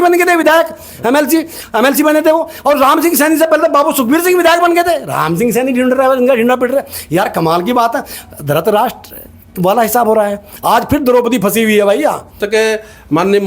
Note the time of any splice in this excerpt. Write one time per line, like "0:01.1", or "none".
0:12.4